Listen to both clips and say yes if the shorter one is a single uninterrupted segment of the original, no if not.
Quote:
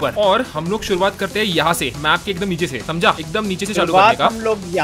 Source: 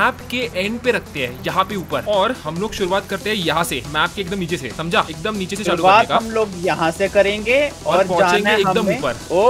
yes